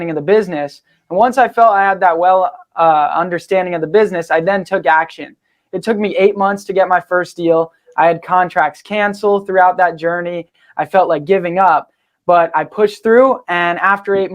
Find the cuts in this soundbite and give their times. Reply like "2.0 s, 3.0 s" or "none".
none